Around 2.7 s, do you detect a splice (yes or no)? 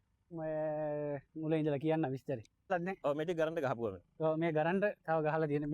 yes